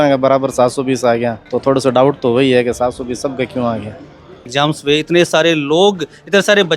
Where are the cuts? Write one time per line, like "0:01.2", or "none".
0:01.4
0:04.5